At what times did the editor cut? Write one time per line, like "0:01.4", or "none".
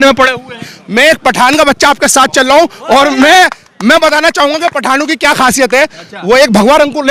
none